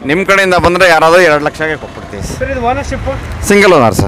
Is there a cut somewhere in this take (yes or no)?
yes